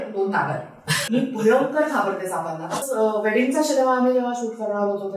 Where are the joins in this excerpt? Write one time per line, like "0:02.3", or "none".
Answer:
0:01.0
0:02.9

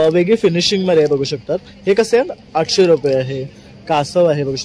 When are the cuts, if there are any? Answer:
none

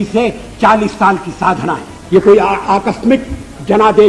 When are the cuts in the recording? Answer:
0:01.9

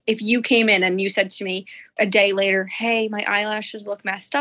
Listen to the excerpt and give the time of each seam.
none

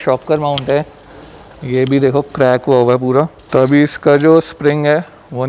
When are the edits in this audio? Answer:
0:03.4

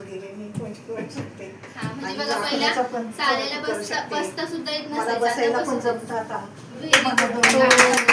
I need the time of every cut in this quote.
none

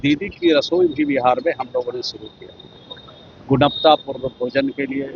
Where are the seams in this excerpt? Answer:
none

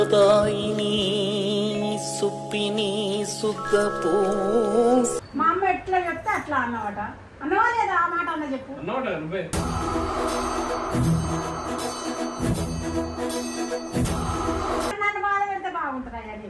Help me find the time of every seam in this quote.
0:05.2
0:14.9

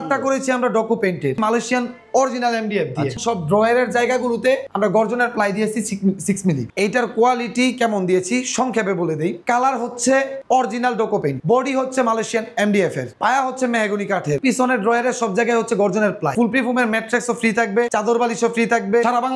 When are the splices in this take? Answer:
0:01.4
0:03.2
0:06.7

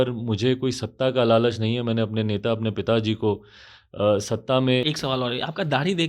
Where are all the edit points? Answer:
0:04.8

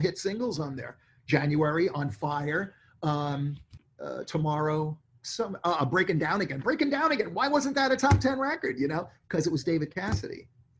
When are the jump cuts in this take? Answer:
none

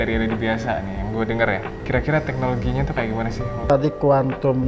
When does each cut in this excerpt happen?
0:01.7
0:03.7

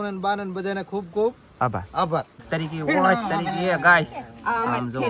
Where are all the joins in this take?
0:02.4

